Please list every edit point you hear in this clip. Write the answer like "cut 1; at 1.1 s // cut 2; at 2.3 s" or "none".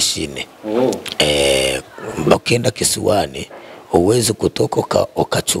cut 1; at 2.3 s